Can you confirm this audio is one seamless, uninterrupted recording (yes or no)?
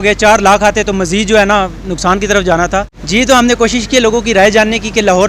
yes